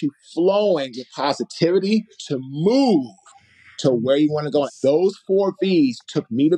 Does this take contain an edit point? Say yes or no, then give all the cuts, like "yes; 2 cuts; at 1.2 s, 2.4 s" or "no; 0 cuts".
yes; 1 cut; at 4.7 s